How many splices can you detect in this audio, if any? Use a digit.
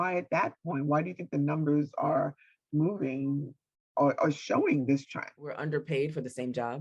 1